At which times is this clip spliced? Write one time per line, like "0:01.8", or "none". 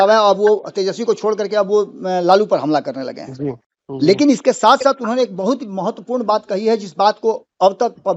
none